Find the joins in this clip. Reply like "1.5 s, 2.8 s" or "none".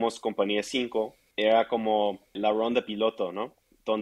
1.2 s, 2.4 s